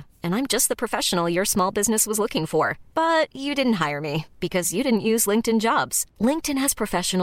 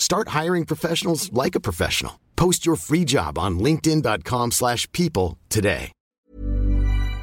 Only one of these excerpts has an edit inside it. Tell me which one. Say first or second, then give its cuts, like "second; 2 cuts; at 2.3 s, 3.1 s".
second; 1 cut; at 6.0 s